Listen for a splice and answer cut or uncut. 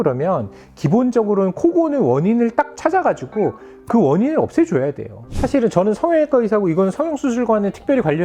cut